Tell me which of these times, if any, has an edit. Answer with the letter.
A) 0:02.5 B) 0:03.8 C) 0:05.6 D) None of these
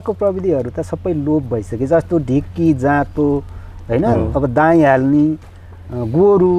D